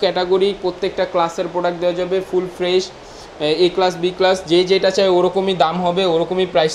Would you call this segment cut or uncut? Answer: uncut